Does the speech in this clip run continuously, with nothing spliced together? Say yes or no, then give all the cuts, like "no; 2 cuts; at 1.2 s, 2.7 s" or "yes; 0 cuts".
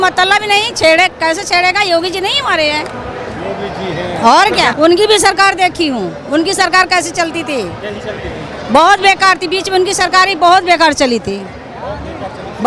yes; 0 cuts